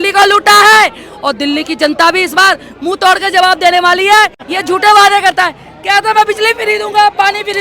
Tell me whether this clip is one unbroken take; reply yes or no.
no